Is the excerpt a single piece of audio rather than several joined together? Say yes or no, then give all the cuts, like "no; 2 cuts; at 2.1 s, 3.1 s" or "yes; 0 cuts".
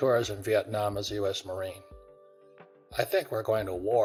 yes; 0 cuts